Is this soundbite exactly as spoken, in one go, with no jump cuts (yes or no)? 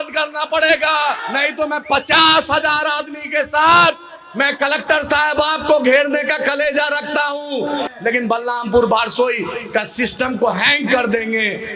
no